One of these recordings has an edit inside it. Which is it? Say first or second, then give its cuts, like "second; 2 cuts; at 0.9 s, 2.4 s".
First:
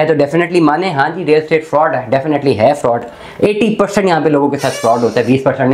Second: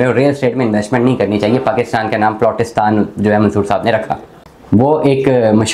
second; 1 cut; at 4.5 s